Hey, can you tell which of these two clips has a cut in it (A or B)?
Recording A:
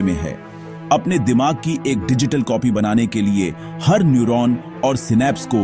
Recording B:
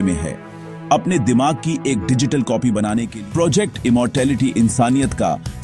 B